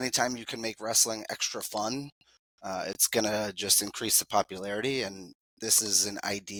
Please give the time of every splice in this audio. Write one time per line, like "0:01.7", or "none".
none